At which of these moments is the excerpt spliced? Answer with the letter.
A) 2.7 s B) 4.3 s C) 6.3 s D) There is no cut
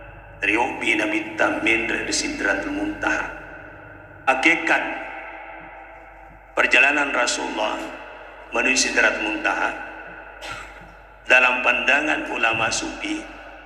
B